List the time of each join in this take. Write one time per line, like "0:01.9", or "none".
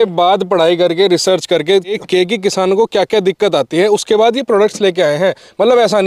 0:02.0